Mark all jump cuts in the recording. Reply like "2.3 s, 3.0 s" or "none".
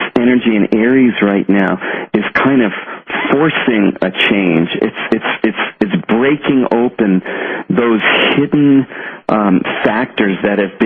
6.4 s